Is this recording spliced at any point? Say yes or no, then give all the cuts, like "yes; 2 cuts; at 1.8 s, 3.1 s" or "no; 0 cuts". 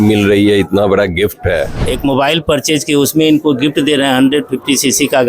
yes; 1 cut; at 1.8 s